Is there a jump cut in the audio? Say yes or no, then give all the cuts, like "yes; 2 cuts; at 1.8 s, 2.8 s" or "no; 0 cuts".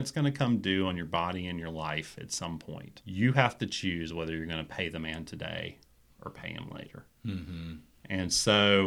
yes; 1 cut; at 2.9 s